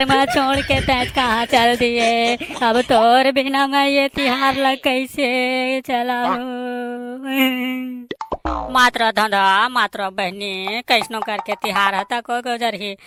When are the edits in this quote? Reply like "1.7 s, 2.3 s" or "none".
none

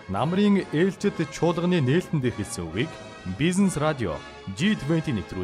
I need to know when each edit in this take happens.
none

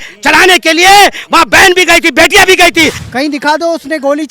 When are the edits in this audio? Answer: 3.0 s

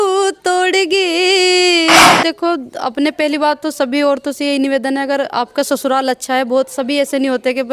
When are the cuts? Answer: 2.1 s

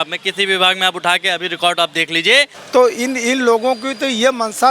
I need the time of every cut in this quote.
2.6 s

